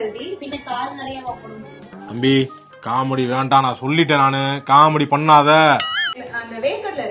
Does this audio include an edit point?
yes; 1 cut; at 6.1 s

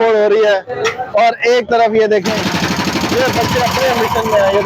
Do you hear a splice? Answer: no; 0 cuts

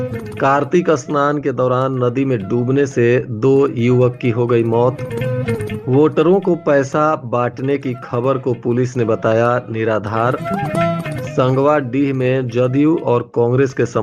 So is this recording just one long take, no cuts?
yes; 0 cuts

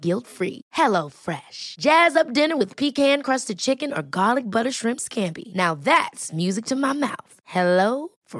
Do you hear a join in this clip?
no; 0 cuts

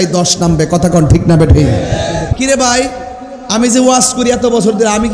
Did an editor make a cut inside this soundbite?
yes; 1 cut; at 2.3 s

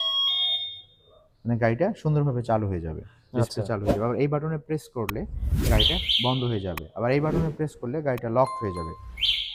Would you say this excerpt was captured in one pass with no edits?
yes; 0 cuts

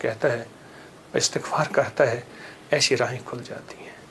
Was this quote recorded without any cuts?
yes; 0 cuts

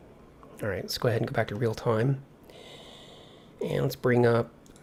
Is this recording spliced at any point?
no; 0 cuts

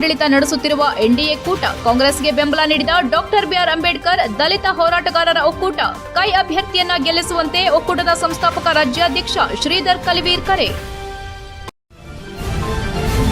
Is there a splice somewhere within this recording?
yes; 1 cut; at 11.8 s

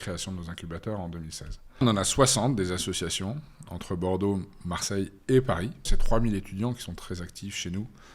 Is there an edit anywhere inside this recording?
yes; 2 cuts; at 1.8 s, 5.9 s

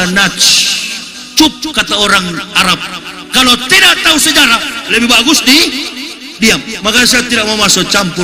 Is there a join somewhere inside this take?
no; 0 cuts

